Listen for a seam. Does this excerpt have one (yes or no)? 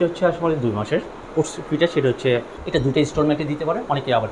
yes